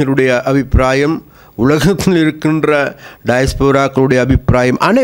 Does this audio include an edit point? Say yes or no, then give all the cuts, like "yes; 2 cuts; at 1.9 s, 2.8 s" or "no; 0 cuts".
no; 0 cuts